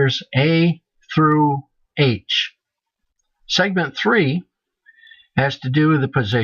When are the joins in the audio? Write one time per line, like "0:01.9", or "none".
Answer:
0:04.2